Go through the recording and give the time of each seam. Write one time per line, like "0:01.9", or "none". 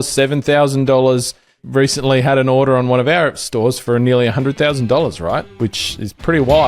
0:01.6
0:05.5